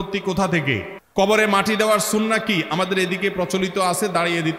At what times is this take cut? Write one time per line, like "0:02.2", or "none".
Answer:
0:00.9